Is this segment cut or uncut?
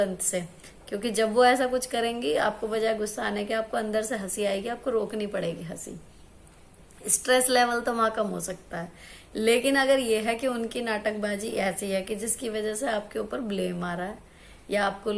uncut